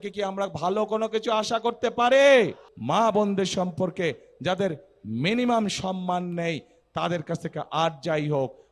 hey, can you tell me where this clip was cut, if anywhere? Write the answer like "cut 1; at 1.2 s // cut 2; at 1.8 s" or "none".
cut 1; at 2.7 s